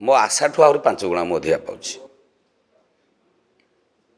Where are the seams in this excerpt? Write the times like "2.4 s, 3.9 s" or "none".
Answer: none